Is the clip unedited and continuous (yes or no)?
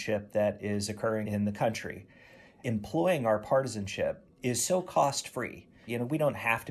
no